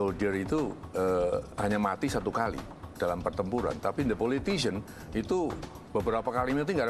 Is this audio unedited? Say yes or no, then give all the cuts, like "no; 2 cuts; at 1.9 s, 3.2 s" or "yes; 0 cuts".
yes; 0 cuts